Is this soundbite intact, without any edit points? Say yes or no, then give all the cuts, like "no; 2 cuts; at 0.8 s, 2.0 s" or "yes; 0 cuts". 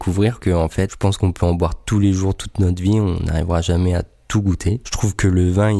no; 2 cuts; at 0.9 s, 4.9 s